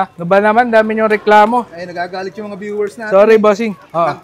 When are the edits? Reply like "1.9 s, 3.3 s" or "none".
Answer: none